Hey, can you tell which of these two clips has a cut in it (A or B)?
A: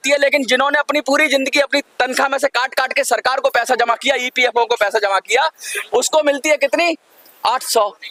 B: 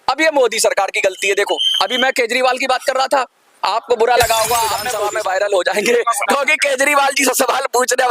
B